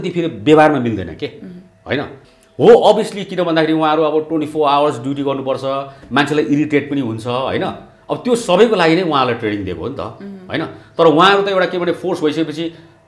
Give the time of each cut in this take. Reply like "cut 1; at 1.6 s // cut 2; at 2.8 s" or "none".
cut 1; at 2.2 s